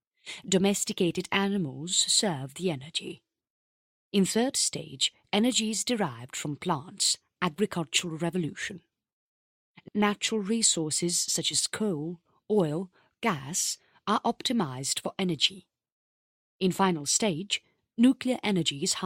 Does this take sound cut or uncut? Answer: cut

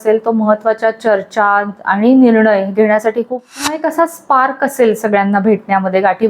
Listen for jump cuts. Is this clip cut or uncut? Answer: cut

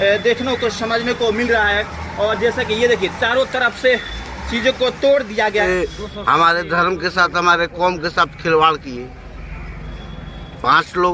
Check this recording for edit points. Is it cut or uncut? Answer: cut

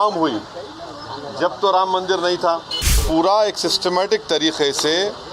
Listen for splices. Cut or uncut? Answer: cut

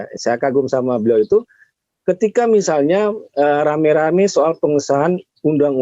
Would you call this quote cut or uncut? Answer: uncut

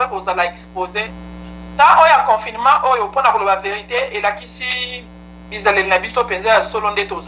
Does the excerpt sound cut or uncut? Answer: cut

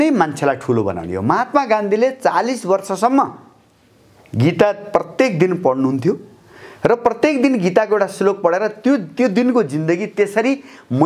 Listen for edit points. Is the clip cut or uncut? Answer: uncut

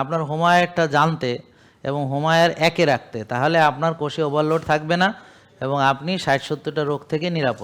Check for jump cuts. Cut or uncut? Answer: uncut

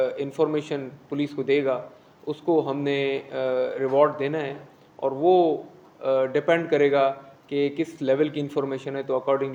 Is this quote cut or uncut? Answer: uncut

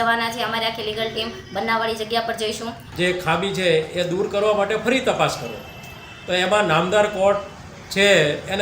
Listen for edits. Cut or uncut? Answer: cut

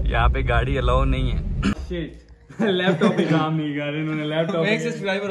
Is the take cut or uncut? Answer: cut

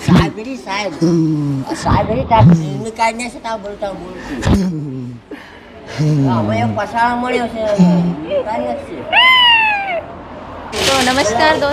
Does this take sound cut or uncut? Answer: cut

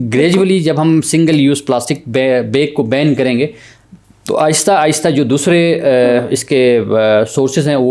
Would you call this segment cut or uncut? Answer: uncut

